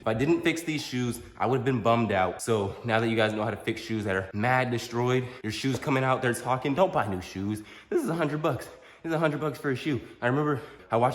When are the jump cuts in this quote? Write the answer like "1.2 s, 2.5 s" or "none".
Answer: none